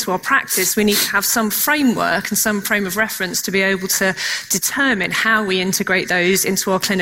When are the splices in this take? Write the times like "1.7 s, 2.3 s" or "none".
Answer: none